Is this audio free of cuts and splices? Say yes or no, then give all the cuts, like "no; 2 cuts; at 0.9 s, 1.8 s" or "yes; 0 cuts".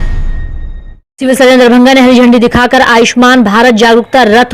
no; 1 cut; at 1.1 s